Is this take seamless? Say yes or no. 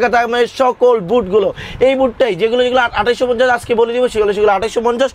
yes